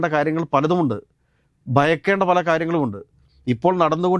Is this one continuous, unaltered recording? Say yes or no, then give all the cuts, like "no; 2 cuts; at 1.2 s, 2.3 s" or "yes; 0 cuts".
yes; 0 cuts